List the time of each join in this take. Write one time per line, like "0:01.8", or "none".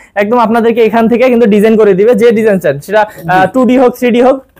none